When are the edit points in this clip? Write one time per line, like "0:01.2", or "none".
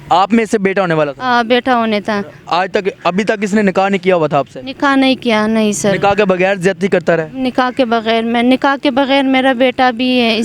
0:02.4